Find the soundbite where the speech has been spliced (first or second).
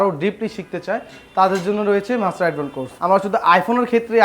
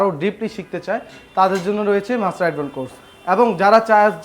first